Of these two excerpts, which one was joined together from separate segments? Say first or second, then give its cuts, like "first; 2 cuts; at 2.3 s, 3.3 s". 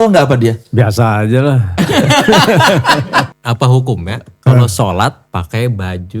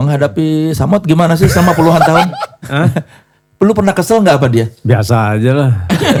first; 2 cuts; at 3.3 s, 5.2 s